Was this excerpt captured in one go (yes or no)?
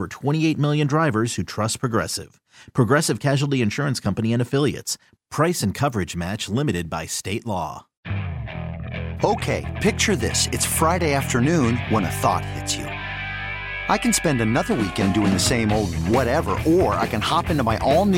no